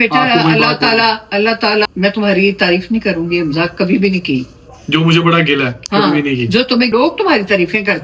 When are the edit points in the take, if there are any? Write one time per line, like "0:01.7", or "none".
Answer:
0:01.9
0:06.9